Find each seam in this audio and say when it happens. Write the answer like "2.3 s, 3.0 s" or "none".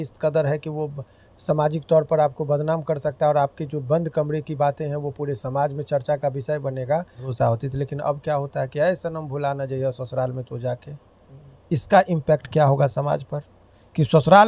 7.3 s